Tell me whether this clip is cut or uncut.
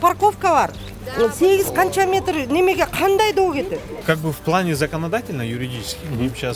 cut